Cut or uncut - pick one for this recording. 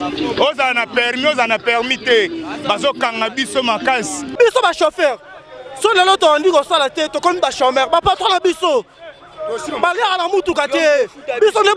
cut